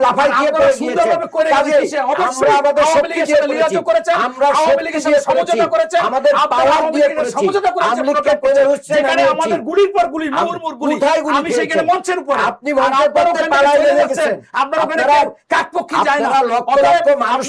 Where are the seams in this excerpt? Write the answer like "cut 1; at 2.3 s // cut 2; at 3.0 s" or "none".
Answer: none